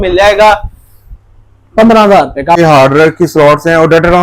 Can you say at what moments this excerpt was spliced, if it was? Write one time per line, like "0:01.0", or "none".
0:02.6